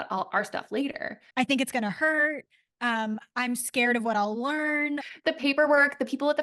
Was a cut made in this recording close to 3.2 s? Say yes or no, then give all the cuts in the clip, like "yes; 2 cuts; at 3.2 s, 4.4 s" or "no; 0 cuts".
no; 2 cuts; at 1.2 s, 4.9 s